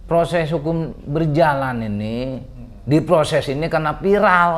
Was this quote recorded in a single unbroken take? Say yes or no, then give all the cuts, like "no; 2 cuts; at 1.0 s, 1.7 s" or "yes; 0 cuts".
yes; 0 cuts